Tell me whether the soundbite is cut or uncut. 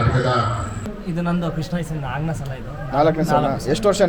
cut